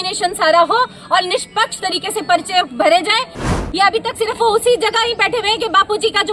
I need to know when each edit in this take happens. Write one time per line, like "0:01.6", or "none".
0:03.4